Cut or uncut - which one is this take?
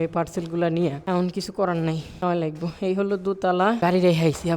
cut